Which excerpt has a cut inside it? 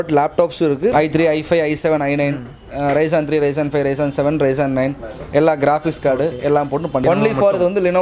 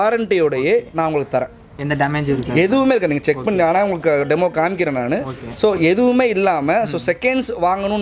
first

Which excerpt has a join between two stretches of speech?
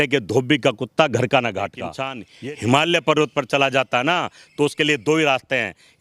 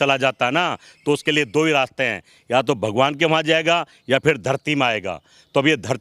first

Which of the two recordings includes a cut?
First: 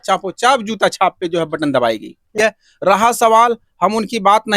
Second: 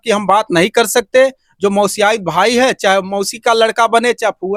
first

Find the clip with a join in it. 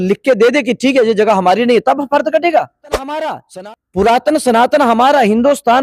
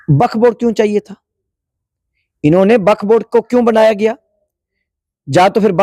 first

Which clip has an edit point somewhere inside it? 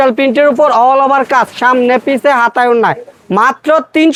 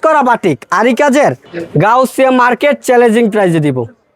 second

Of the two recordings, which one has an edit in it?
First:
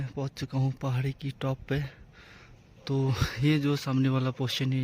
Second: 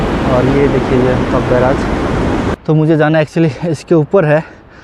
second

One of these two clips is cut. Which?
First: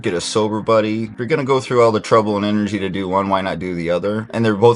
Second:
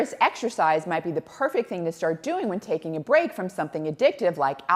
first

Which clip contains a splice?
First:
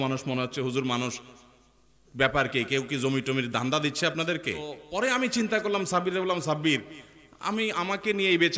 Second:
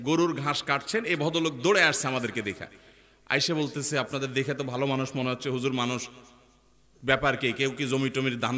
first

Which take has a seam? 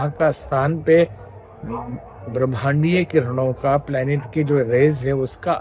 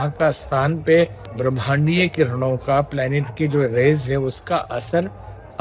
second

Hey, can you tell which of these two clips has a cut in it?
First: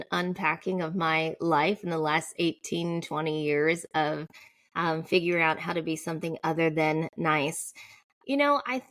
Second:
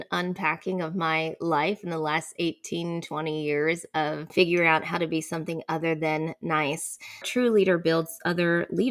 second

